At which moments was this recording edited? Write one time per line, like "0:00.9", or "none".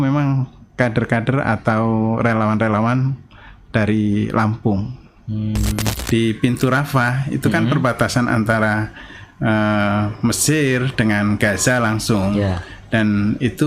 0:05.9